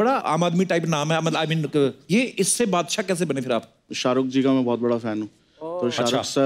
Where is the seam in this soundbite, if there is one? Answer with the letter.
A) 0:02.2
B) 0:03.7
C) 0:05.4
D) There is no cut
D